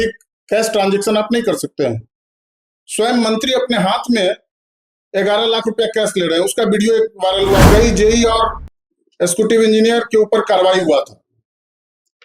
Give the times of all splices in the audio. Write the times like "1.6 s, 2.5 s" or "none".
7.7 s